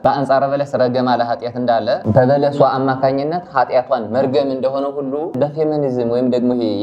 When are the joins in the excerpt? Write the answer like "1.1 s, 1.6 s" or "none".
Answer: none